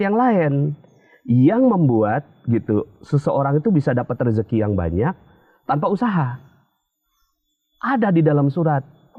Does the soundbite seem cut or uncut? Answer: uncut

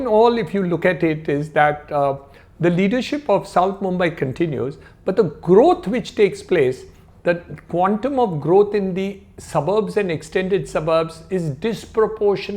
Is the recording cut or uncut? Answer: uncut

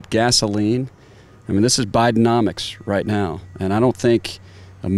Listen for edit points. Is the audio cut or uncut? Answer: uncut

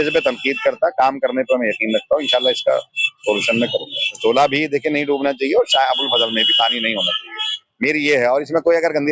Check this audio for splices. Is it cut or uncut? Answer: cut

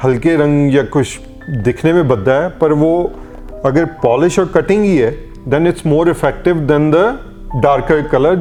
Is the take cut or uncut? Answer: uncut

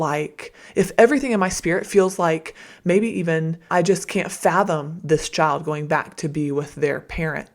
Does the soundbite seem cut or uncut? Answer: cut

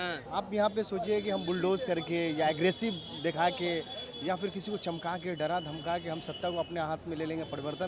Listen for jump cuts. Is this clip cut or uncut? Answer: uncut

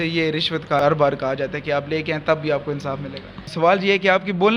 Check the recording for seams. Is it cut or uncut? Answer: cut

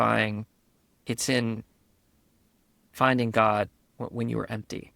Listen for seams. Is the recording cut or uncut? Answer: cut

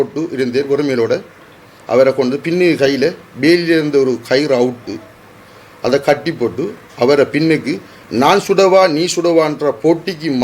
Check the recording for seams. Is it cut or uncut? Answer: uncut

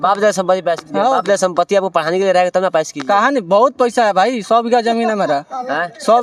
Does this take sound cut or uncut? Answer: uncut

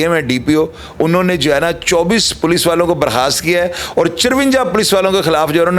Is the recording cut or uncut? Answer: uncut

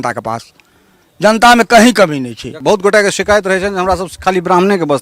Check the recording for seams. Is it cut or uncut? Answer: cut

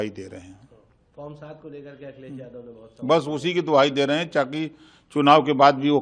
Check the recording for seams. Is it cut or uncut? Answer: uncut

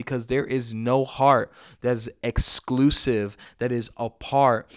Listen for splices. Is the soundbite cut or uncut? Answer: uncut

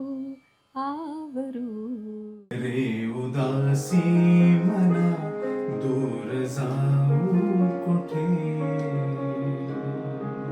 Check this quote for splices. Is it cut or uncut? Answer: cut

